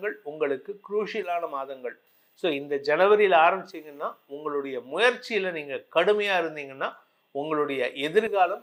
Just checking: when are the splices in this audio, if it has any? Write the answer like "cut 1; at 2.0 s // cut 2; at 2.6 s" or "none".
none